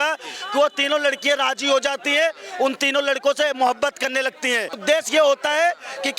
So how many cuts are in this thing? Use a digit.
1